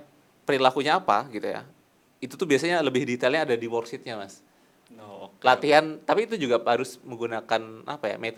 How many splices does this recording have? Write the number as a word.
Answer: zero